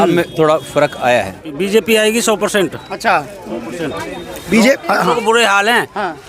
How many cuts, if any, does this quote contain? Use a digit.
1